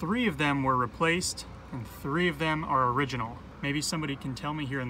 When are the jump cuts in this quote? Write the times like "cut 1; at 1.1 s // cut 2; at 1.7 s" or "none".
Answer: cut 1; at 3.4 s

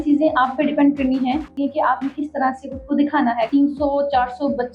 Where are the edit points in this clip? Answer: cut 1; at 1.5 s // cut 2; at 3.5 s

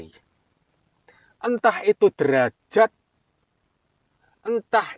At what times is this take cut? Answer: none

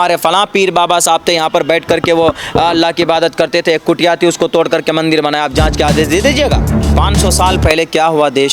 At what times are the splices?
cut 1; at 6.8 s

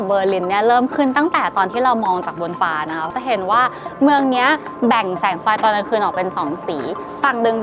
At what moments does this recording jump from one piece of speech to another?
cut 1; at 3.1 s

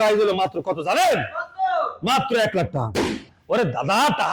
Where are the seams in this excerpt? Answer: cut 1; at 3.3 s

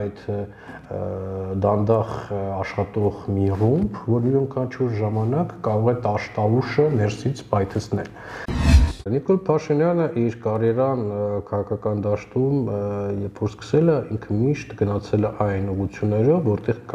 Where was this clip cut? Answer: cut 1; at 8.6 s

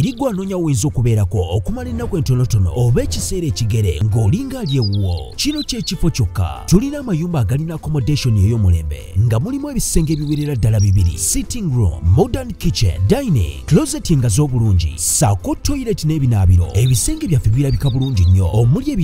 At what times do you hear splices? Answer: none

